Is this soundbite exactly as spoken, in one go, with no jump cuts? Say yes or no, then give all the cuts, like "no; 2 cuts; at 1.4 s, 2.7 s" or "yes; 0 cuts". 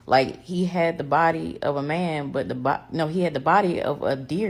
yes; 0 cuts